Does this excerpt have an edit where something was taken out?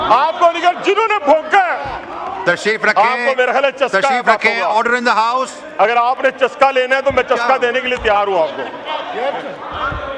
yes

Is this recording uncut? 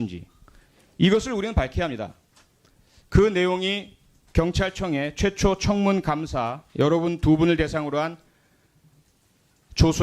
no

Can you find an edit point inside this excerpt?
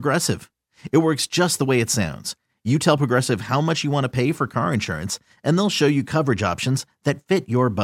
no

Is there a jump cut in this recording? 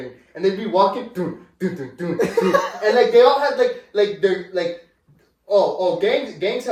no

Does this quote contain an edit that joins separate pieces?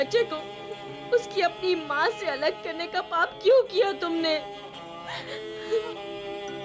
no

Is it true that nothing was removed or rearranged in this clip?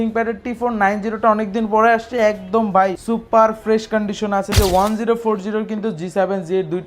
no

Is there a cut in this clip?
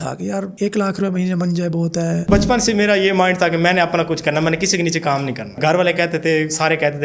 yes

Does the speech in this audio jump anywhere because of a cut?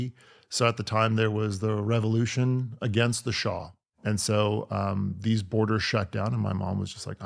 yes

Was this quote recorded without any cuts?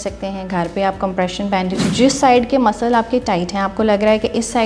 no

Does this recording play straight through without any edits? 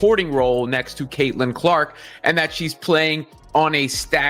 yes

